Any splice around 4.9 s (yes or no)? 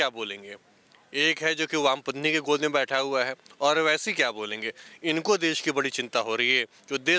no